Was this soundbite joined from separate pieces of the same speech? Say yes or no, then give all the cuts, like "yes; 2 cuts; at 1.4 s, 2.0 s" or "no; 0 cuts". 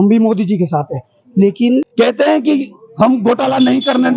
yes; 1 cut; at 1.9 s